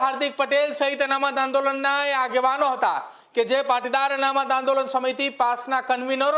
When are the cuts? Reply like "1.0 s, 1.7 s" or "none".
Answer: none